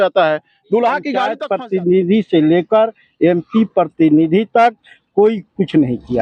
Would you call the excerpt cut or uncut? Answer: cut